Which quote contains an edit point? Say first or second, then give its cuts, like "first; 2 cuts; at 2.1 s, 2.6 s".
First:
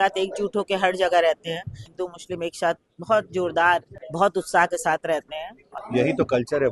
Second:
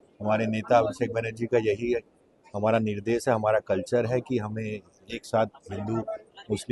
first; 3 cuts; at 1.9 s, 4.0 s, 5.6 s